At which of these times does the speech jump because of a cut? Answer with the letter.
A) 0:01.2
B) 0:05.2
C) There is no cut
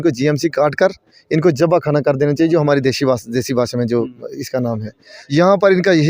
B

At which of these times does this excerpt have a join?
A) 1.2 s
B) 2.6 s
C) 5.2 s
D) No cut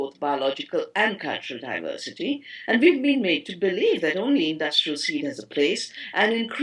C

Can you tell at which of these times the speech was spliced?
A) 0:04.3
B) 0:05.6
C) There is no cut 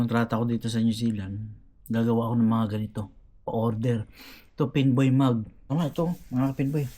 B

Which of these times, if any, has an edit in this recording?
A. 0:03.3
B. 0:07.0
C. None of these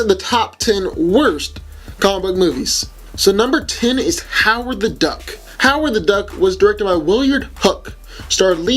A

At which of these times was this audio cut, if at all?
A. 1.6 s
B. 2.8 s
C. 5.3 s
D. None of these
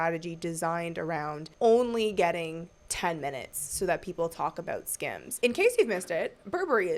C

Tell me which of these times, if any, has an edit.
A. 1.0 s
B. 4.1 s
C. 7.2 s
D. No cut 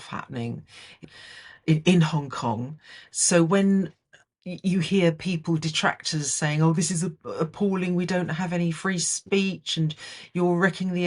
A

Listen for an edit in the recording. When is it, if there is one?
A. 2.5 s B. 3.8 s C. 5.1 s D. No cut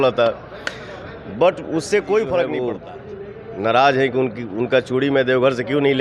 A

